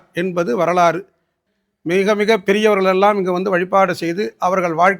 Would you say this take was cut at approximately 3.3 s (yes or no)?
no